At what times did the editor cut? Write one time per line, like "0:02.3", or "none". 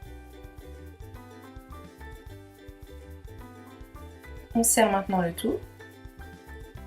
0:03.5